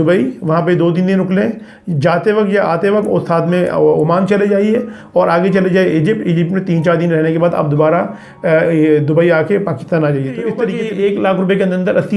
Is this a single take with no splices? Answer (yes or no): no